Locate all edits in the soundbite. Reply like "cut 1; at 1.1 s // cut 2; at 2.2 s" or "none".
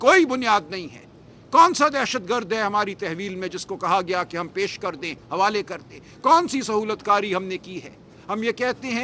none